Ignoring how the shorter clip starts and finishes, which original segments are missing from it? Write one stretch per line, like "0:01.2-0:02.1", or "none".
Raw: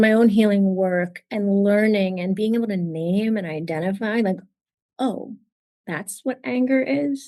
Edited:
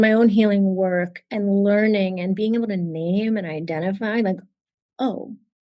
none